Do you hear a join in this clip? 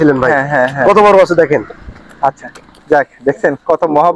no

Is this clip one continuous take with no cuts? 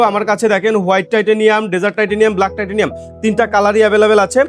yes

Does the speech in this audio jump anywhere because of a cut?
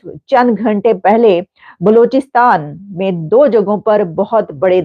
no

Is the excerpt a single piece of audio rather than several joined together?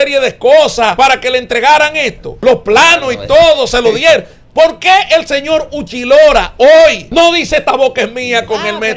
no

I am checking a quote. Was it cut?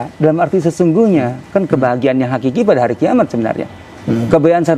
no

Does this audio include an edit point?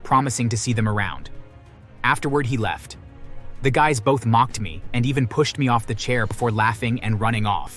yes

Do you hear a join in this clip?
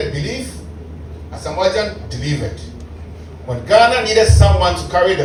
no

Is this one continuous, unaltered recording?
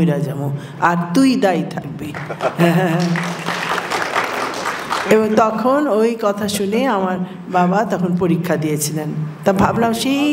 yes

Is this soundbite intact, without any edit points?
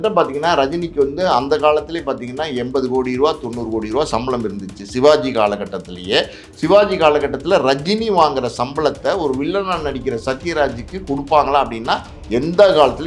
yes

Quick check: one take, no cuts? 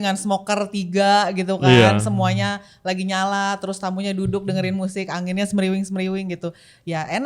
yes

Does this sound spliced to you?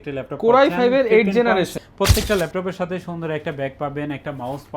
yes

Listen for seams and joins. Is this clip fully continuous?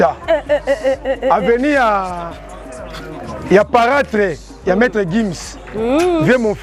yes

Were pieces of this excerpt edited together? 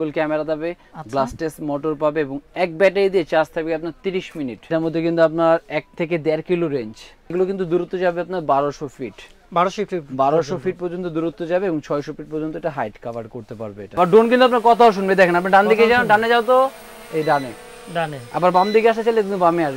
yes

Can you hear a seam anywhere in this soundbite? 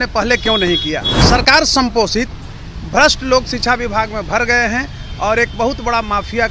yes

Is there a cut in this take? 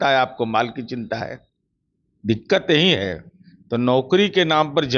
no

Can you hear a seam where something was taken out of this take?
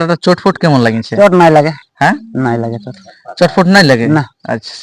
no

